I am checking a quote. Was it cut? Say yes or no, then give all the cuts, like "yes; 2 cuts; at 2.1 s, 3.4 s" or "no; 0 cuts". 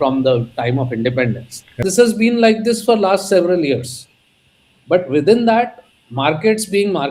yes; 1 cut; at 1.8 s